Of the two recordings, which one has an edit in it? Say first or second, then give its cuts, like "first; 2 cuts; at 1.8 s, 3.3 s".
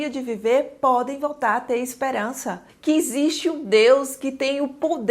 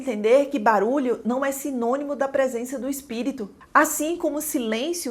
first; 1 cut; at 2.7 s